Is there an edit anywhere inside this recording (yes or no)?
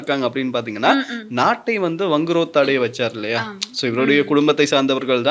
no